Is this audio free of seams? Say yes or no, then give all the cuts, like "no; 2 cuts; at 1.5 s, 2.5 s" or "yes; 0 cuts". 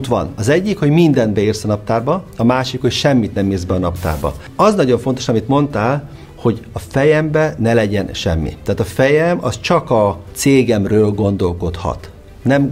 no; 2 cuts; at 4.4 s, 10.3 s